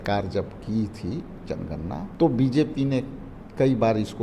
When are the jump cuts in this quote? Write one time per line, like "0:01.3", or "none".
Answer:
0:02.1